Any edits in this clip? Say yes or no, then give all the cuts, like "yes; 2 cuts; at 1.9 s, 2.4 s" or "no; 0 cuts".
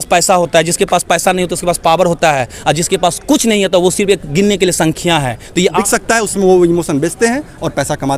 yes; 1 cut; at 5.8 s